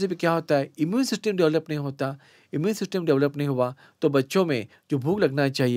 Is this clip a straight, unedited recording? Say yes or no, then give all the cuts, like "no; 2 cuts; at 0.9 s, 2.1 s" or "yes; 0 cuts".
yes; 0 cuts